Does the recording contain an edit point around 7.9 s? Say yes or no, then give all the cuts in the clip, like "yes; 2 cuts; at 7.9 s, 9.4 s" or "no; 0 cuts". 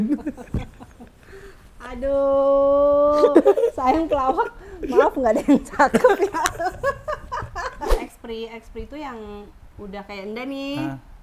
yes; 1 cut; at 7.9 s